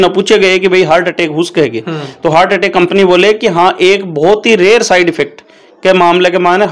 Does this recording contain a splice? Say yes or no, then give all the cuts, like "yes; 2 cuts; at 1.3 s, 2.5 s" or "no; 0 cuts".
no; 0 cuts